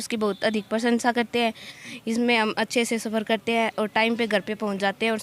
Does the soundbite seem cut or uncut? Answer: cut